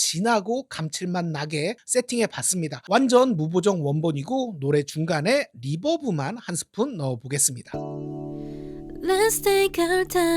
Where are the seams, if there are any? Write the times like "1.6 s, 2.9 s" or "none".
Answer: 7.6 s